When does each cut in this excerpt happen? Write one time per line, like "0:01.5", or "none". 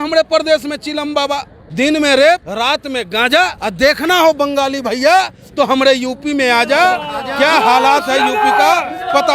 0:01.6
0:02.5
0:03.6

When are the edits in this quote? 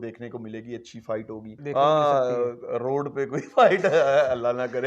0:01.5

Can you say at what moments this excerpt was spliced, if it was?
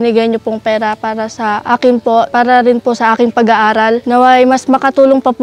0:01.6
0:02.3
0:04.0

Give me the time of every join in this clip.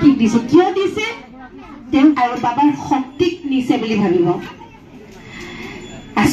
0:02.2

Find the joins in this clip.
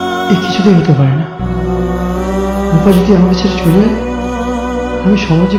none

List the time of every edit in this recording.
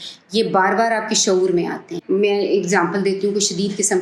0:01.9

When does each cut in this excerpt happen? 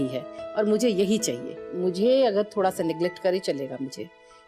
0:01.7

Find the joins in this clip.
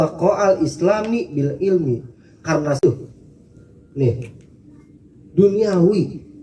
0:02.8

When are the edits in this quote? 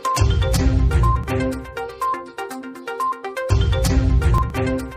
0:02.0

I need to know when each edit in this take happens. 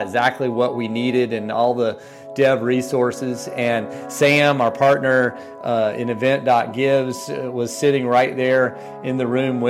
none

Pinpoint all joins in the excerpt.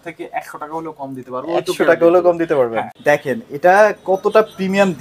0:02.9

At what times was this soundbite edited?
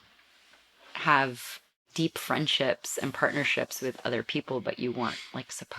0:01.9

